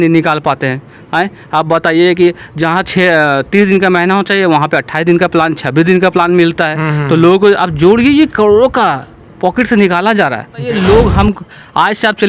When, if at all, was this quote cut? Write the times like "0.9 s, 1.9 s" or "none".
10.7 s